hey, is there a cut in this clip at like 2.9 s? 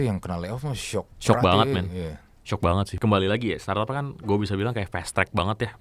yes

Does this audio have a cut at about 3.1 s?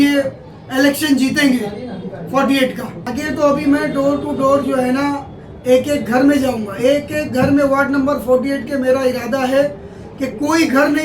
yes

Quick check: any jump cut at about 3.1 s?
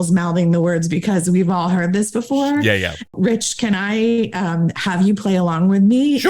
yes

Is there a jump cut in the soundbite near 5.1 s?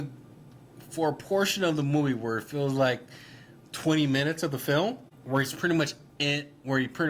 yes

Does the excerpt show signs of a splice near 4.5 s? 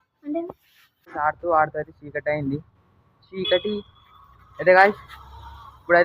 no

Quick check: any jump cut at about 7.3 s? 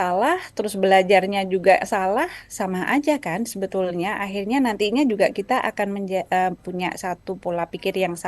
no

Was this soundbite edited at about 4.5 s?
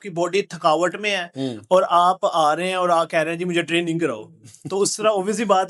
no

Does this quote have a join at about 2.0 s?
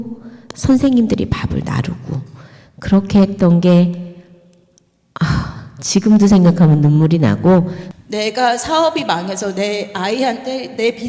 no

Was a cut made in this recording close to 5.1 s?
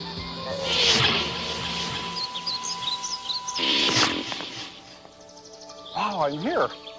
no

